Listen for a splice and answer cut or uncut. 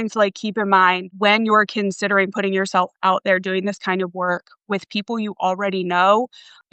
cut